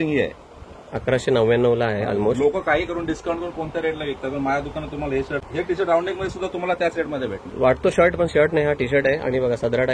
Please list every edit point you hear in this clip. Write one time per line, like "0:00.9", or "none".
0:05.5
0:07.5